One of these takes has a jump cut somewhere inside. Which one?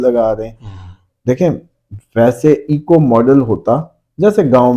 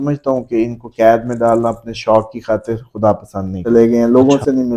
second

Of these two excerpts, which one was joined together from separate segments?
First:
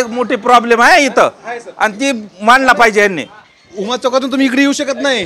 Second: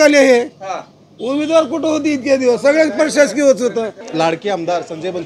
second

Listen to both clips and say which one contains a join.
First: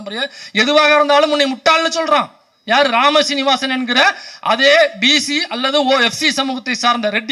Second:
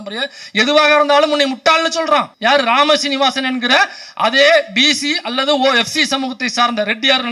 second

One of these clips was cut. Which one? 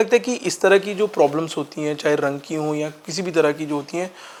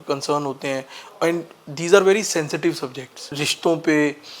second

